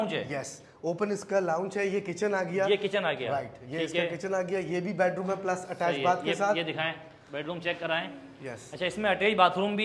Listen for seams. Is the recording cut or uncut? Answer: uncut